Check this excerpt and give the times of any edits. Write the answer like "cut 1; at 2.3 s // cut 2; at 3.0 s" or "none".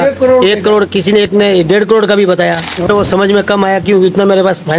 cut 1; at 2.9 s